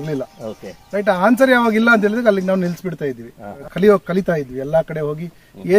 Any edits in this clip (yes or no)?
yes